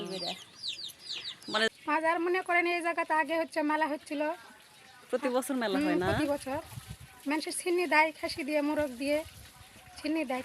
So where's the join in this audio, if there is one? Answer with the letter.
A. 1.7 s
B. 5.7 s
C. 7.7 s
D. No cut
A